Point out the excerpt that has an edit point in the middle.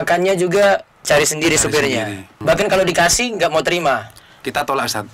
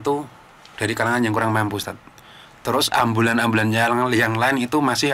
first; 1 cut; at 2.4 s

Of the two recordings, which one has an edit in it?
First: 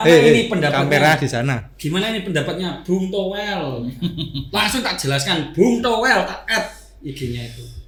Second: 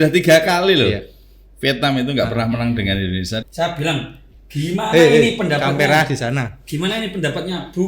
second; 1 cut; at 3.4 s

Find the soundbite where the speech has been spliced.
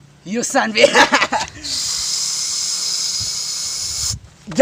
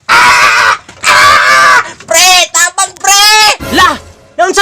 second; 1 cut; at 3.6 s

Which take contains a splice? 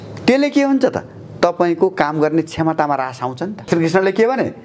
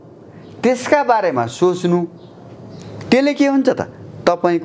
first; 1 cut; at 3.7 s

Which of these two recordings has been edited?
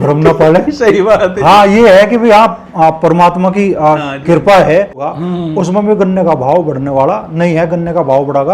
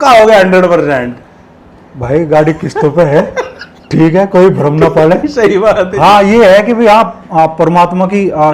first; 1 cut; at 5.0 s

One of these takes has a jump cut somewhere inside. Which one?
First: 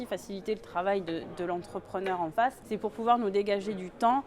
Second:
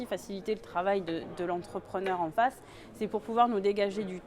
first; 1 cut; at 2.6 s

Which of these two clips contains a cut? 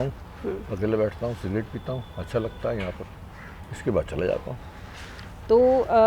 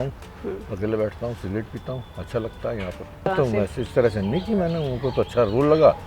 second; 1 cut; at 3.3 s

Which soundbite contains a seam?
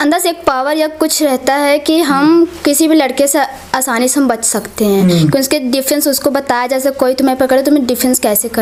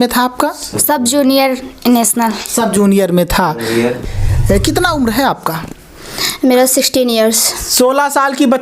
second; 1 cut; at 4.0 s

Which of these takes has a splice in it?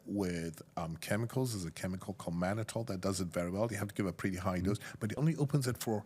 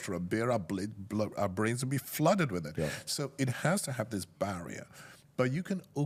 first; 1 cut; at 5.1 s

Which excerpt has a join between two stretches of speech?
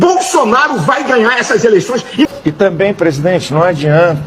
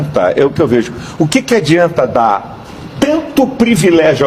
first; 1 cut; at 2.3 s

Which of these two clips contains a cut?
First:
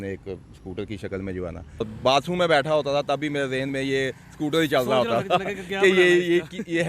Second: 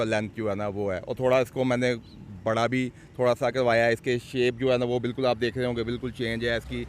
first; 1 cut; at 1.8 s

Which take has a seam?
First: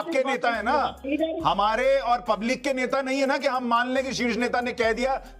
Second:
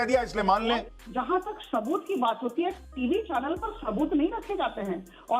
second; 1 cut; at 0.9 s

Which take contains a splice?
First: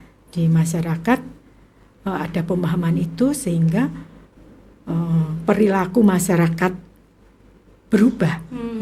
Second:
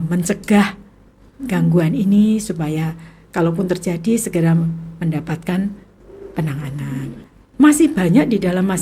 second; 1 cut; at 7.2 s

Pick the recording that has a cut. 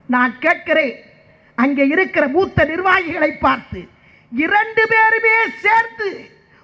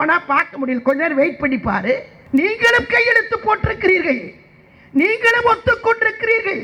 second; 1 cut; at 2.1 s

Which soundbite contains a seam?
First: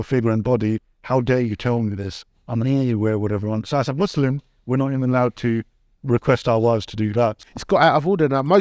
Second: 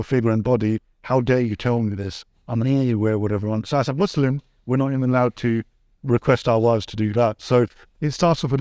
first; 1 cut; at 7.4 s

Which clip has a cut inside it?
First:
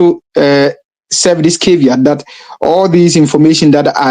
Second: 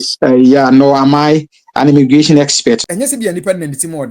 second; 1 cut; at 2.8 s

